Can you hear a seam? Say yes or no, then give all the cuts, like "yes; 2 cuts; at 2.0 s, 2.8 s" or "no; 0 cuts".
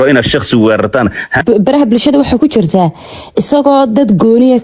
yes; 1 cut; at 1.3 s